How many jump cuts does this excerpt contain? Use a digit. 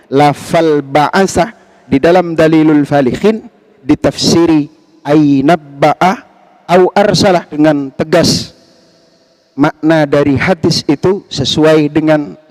1